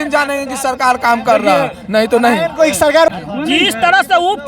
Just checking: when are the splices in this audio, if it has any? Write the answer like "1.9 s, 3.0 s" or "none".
3.1 s